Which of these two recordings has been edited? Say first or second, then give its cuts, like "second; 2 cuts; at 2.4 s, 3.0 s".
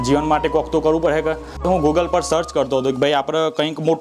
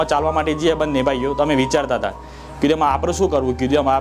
first; 1 cut; at 1.6 s